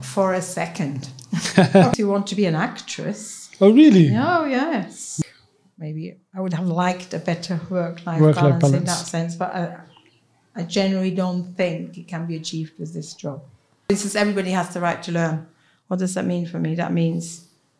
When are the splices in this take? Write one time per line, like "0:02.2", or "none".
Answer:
0:01.9
0:05.1
0:13.9